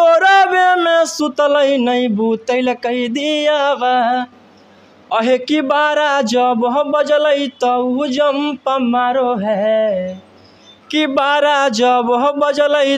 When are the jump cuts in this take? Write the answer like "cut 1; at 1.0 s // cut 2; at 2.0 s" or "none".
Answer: none